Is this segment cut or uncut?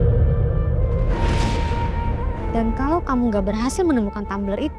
uncut